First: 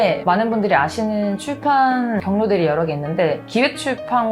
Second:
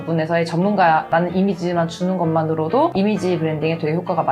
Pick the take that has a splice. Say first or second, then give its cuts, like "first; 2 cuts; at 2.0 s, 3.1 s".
first; 1 cut; at 2.2 s